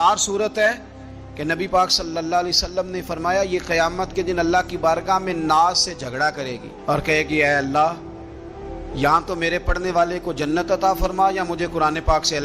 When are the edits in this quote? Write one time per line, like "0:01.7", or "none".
none